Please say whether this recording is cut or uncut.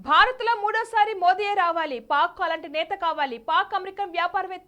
uncut